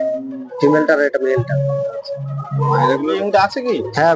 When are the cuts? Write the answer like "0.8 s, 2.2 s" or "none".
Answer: 3.1 s